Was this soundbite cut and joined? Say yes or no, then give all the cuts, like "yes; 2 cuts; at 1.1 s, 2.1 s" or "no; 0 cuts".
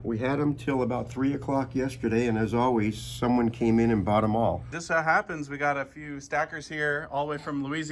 yes; 1 cut; at 4.8 s